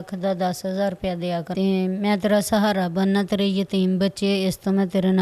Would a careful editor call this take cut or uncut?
cut